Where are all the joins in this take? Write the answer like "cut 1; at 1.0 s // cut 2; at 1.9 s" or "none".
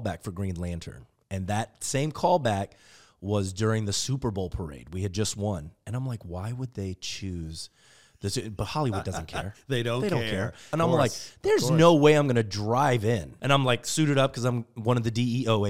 cut 1; at 10.7 s // cut 2; at 13.3 s